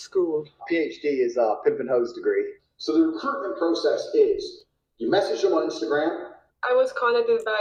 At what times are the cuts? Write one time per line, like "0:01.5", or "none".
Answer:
none